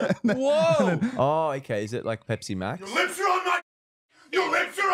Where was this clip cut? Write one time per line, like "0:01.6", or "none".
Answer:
0:01.1